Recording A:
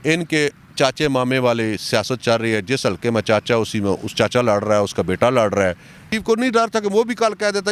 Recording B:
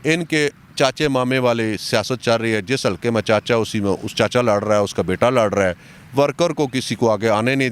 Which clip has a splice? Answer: A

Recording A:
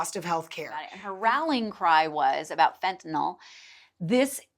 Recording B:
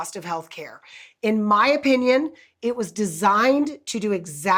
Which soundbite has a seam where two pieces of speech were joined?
A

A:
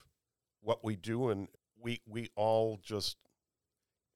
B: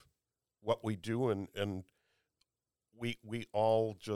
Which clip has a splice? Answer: A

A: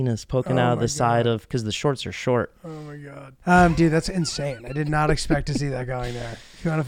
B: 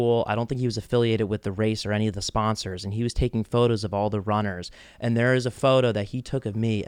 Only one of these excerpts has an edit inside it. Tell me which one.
A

